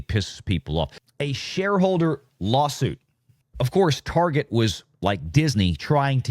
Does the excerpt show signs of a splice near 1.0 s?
yes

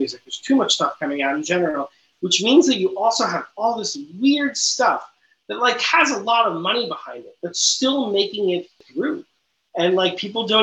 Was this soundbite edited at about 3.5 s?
no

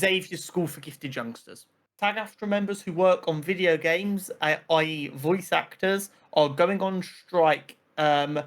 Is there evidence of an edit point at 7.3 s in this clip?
no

